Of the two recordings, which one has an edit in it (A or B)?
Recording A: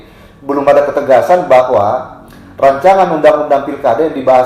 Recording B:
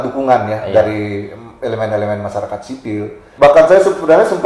B